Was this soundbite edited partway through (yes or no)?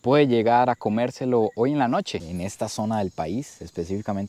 yes